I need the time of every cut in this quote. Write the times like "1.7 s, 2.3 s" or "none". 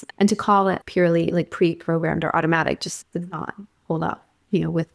0.8 s, 2.9 s